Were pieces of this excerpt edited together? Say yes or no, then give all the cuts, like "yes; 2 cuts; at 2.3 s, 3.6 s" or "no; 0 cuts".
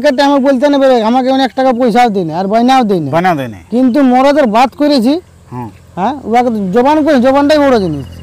no; 0 cuts